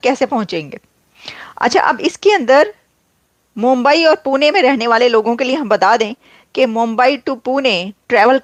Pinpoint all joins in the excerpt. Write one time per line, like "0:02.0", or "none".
none